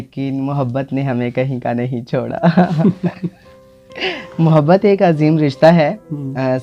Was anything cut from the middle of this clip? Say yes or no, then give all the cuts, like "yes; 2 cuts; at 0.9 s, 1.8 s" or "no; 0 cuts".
no; 0 cuts